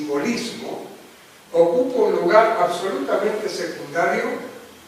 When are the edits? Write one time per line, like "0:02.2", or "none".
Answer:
none